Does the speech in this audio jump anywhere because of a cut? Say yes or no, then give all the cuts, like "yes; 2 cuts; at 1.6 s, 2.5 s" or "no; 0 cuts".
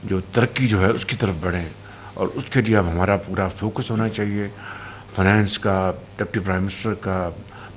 no; 0 cuts